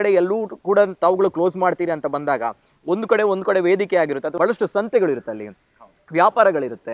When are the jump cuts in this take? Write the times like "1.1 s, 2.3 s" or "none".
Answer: 4.3 s